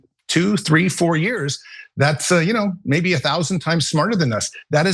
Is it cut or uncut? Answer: uncut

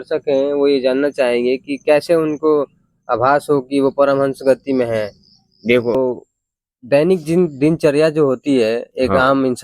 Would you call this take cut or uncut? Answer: cut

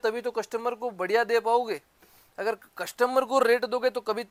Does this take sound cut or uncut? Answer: uncut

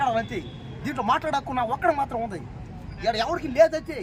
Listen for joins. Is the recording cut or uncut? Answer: uncut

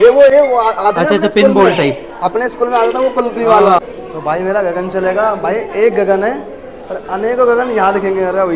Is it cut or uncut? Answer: cut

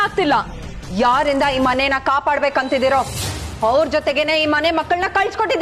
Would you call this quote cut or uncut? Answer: uncut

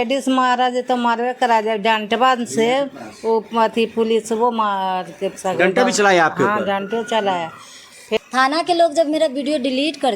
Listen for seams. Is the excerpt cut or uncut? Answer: cut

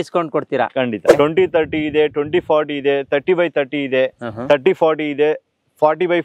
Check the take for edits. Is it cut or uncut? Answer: cut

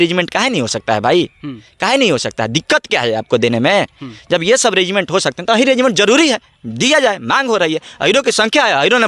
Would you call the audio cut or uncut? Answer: uncut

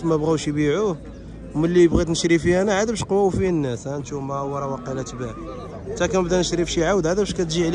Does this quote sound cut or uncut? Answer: uncut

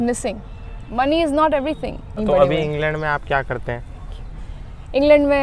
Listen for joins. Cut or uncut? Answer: cut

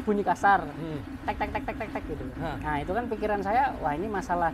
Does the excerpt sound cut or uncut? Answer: cut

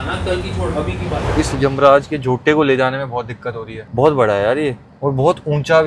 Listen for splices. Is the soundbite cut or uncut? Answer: cut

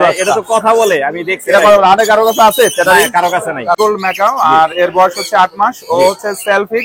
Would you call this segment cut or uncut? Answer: cut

